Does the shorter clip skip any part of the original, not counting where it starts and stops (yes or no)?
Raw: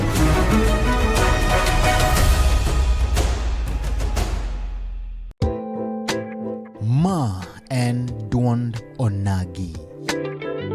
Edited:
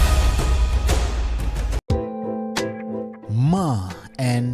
yes